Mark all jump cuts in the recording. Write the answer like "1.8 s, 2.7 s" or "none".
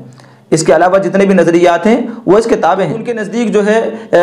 3.2 s